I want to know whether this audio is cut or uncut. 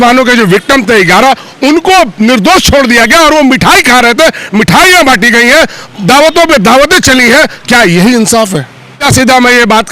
cut